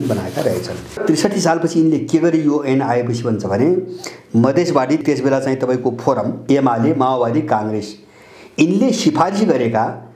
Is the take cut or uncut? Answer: cut